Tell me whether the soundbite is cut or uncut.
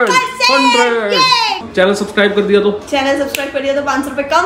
cut